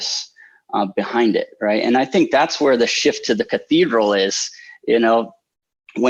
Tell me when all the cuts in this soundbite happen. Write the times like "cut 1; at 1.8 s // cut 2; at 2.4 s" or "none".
none